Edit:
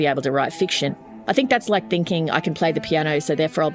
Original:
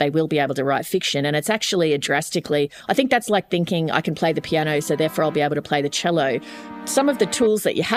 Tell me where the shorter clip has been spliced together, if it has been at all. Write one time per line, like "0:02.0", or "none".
0:01.1